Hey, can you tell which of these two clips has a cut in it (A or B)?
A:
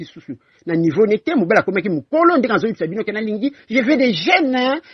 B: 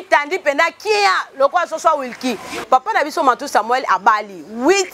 B